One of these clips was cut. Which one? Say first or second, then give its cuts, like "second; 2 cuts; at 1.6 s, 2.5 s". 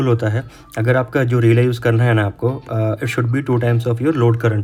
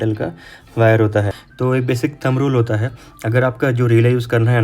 second; 1 cut; at 1.4 s